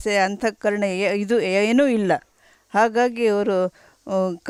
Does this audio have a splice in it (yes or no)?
no